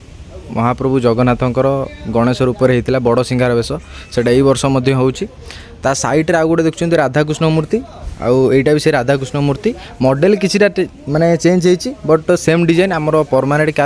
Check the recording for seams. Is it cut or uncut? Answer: uncut